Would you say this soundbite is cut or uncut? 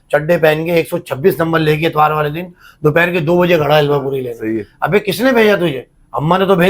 uncut